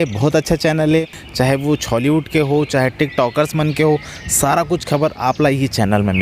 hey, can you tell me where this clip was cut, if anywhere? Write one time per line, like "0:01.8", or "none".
0:01.1